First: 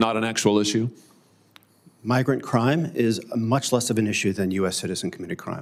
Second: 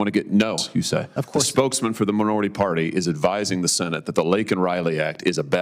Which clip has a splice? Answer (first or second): second